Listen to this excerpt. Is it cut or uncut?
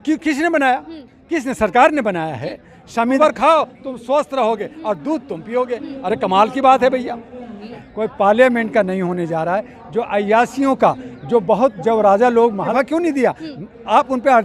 cut